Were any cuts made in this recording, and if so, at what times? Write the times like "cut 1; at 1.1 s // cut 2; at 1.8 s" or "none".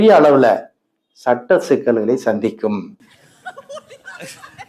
cut 1; at 2.9 s